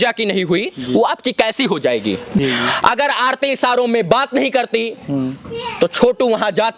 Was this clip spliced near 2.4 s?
yes; 1 cut; at 2.4 s

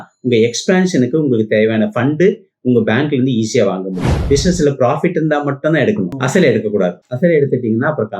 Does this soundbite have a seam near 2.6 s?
no; 2 cuts; at 4.1 s, 6.2 s

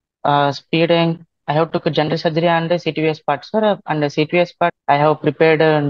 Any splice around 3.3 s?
no; 2 cuts; at 1.4 s, 4.7 s

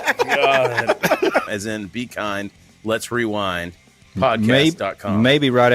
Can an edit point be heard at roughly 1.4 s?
yes; 1 cut; at 1.4 s

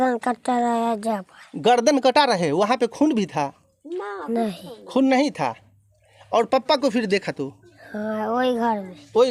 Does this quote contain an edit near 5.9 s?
no; 0 cuts

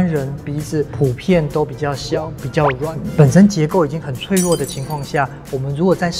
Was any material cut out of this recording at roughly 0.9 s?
yes; 2 cuts; at 0.9 s, 3.0 s

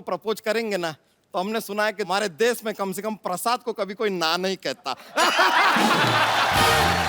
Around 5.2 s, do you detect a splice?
no; 1 cut; at 2.1 s

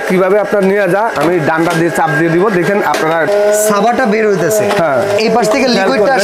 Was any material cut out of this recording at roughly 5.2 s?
yes; 2 cuts; at 3.3 s, 5.2 s

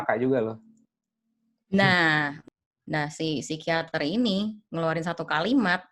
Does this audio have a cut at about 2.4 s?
yes; 1 cut; at 2.4 s

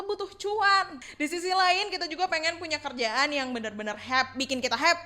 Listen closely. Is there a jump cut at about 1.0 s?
yes; 1 cut; at 1.0 s

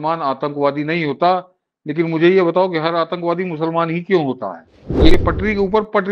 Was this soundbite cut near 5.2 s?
yes; 1 cut; at 5.2 s

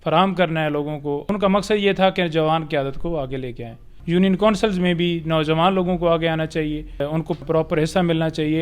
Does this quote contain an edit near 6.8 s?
no; 2 cuts; at 1.2 s, 3.9 s

